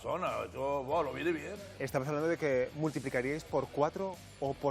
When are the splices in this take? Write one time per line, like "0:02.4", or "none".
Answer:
0:01.6